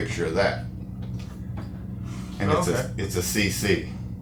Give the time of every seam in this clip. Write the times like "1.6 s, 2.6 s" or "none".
none